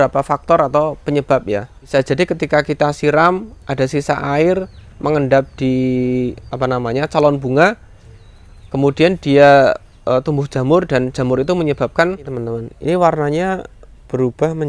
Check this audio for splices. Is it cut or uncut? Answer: cut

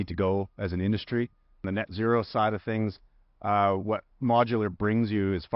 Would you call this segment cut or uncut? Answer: cut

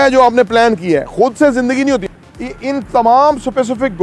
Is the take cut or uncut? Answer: cut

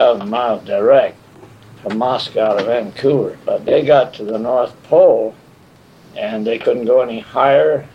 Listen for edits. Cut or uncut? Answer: cut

